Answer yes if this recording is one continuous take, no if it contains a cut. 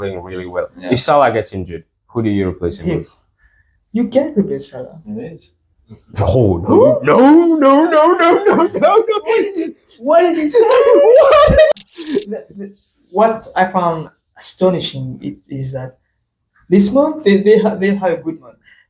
no